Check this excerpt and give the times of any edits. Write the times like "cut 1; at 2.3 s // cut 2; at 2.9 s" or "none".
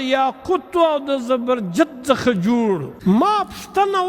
cut 1; at 2.9 s